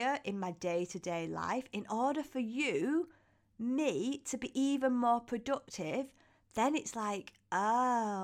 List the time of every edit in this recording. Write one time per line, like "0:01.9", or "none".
none